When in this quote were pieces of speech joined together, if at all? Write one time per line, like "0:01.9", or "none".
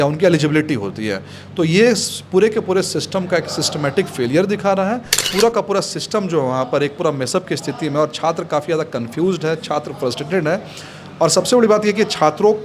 0:05.3